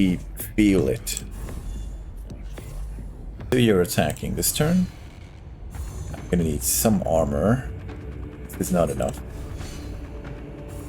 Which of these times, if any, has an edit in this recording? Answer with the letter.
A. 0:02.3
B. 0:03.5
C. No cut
B